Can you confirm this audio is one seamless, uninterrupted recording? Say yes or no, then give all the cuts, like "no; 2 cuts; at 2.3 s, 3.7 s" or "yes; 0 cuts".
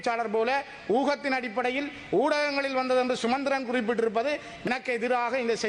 no; 1 cut; at 4.7 s